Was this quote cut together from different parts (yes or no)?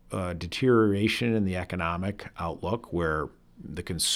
no